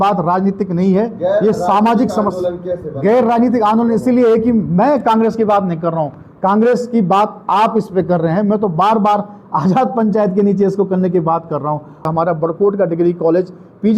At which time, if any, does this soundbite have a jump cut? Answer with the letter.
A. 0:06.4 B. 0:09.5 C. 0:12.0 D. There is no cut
C